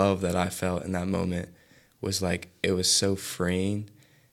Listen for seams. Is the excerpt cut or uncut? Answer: uncut